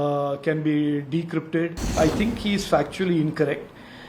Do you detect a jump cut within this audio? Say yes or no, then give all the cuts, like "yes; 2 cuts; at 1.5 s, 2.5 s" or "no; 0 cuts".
yes; 1 cut; at 1.9 s